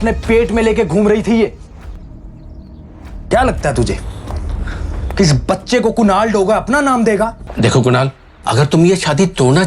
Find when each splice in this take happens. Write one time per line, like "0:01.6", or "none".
0:03.3
0:07.4